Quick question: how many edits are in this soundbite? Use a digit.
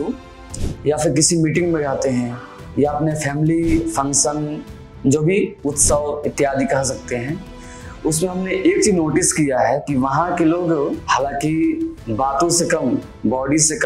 1